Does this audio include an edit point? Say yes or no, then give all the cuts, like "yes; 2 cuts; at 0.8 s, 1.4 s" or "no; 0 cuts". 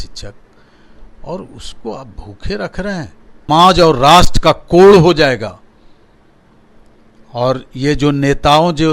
yes; 1 cut; at 3.5 s